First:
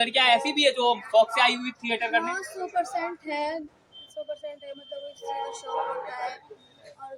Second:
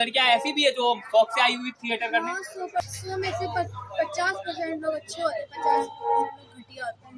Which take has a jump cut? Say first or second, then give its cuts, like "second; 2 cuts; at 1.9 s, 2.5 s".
second; 1 cut; at 2.8 s